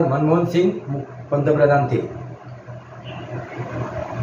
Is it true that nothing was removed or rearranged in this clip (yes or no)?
yes